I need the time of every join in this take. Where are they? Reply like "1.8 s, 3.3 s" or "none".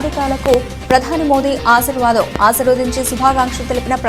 none